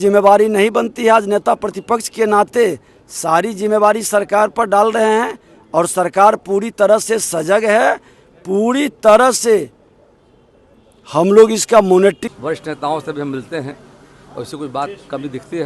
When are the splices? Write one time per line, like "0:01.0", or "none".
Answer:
0:12.2